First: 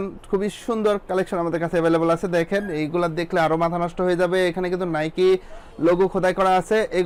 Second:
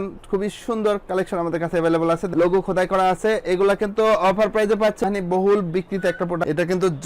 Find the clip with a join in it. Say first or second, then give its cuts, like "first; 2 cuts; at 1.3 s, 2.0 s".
second; 2 cuts; at 2.2 s, 5.0 s